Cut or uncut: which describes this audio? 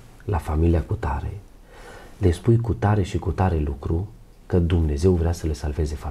uncut